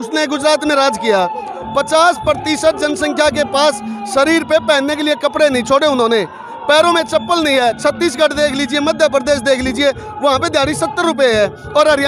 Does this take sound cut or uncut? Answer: uncut